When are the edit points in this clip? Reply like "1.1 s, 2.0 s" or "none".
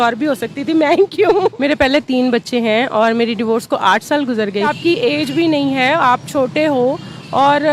1.5 s, 4.7 s